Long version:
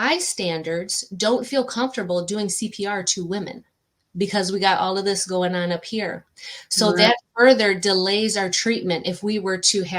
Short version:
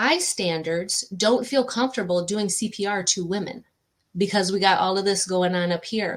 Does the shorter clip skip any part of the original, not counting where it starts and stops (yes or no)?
no